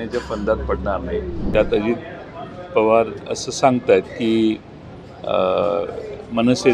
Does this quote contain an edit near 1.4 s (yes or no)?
yes